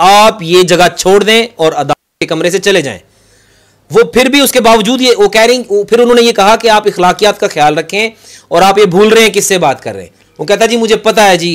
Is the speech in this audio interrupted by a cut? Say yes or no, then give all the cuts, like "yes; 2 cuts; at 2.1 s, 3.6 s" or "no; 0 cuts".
no; 0 cuts